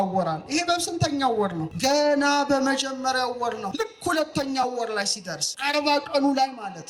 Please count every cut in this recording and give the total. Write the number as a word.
three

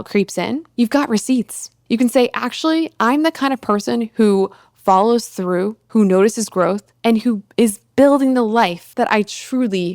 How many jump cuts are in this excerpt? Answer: two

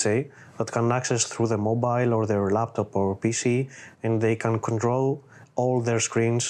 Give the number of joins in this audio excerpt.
zero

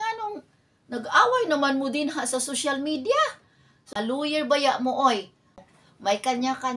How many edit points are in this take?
two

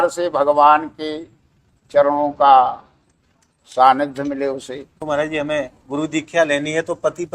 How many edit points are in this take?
one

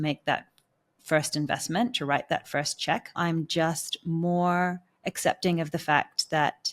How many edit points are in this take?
one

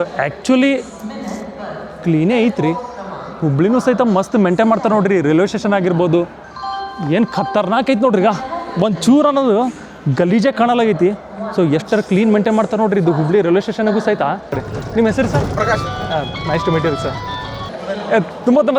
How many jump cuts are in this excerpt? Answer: one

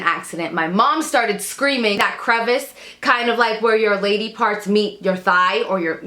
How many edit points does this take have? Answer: one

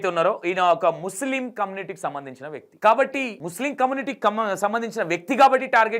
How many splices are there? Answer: two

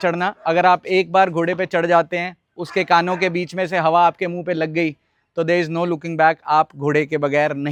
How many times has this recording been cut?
zero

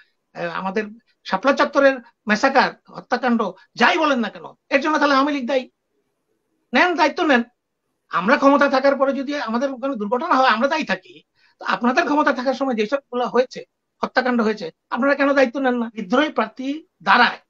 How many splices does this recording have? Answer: one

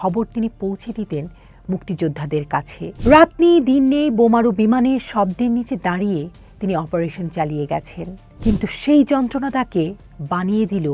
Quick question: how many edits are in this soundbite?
two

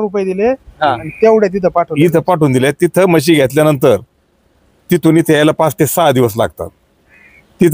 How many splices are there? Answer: zero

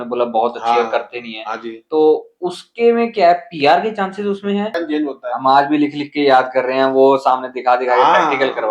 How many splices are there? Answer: one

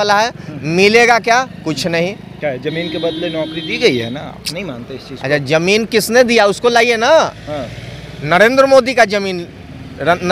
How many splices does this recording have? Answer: zero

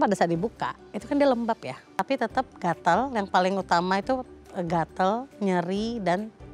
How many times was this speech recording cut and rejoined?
one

